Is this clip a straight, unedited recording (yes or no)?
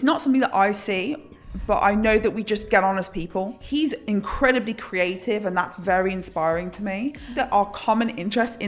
no